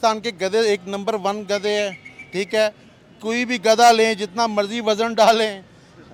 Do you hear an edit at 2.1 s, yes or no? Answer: no